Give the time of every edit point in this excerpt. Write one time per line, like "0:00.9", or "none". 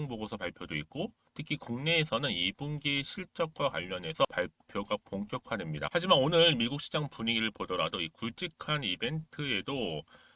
0:04.2
0:05.9